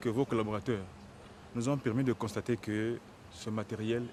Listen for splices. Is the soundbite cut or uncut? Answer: uncut